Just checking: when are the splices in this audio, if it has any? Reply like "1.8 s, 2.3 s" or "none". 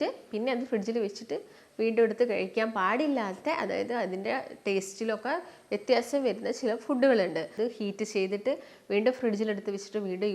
7.5 s